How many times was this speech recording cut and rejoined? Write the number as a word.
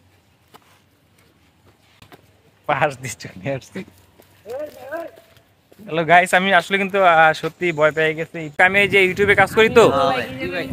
one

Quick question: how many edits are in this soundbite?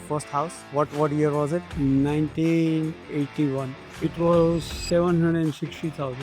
two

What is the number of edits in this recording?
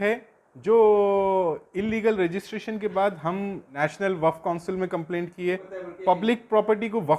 two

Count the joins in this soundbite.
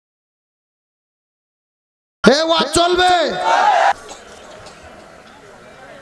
one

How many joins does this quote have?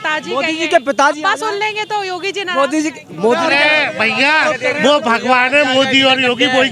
one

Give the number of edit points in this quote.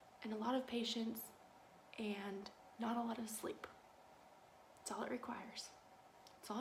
zero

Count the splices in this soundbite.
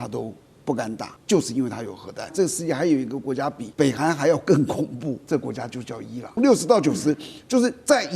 five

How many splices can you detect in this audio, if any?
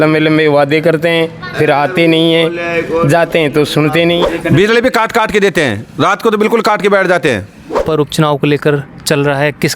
two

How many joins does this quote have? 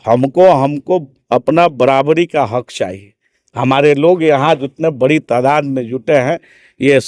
zero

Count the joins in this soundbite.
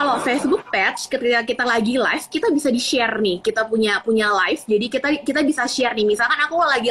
zero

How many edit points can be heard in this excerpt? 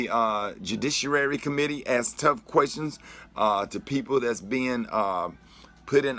one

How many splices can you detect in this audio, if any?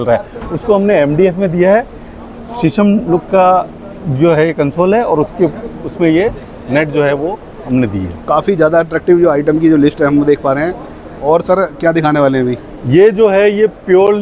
zero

